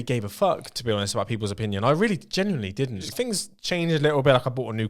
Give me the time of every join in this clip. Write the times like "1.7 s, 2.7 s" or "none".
3.1 s